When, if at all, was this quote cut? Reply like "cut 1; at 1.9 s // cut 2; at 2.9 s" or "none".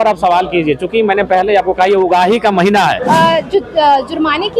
cut 1; at 3.0 s